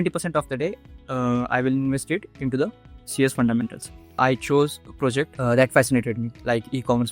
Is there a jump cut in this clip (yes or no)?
yes